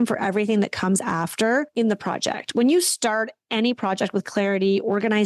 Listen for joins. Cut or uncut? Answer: cut